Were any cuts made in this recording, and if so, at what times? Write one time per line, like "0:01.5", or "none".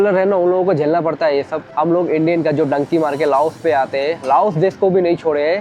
0:01.6